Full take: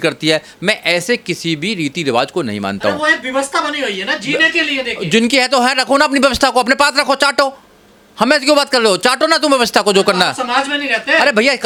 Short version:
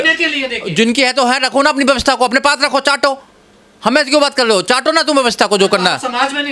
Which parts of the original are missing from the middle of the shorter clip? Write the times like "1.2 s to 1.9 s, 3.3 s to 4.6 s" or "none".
none